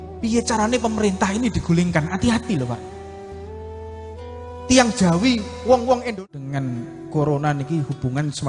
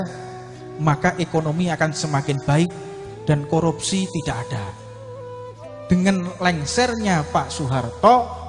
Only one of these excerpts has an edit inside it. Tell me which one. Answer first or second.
first